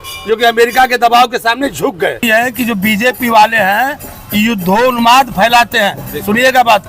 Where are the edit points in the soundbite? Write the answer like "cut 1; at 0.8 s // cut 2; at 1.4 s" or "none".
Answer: cut 1; at 2.2 s